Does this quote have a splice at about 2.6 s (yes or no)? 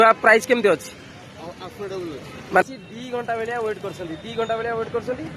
yes